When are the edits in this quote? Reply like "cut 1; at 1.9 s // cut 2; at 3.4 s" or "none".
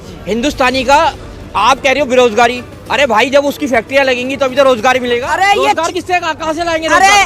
cut 1; at 5.2 s